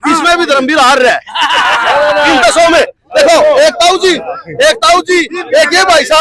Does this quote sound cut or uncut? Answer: uncut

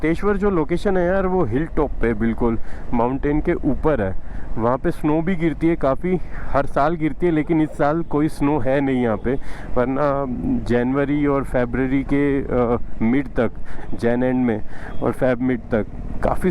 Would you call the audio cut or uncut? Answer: uncut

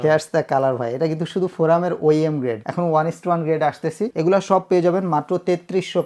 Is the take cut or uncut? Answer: uncut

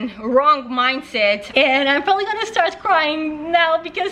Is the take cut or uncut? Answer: cut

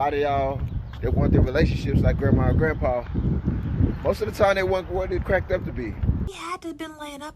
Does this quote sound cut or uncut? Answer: cut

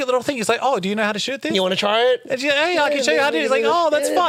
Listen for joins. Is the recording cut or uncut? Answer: uncut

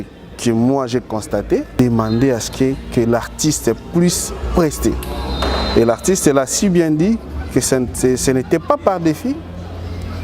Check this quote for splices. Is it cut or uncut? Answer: cut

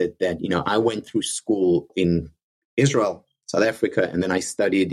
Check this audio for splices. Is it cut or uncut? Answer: cut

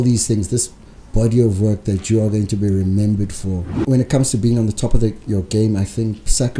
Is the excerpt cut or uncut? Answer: cut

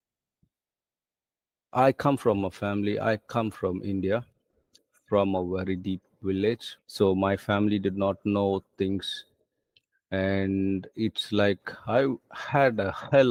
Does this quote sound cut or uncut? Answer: uncut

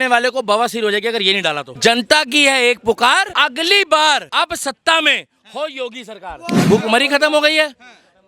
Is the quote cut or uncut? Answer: cut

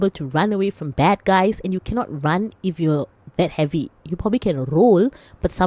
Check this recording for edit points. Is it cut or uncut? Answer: uncut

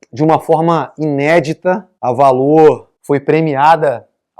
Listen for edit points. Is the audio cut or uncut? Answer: cut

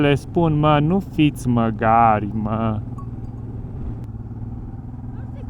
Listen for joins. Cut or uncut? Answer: cut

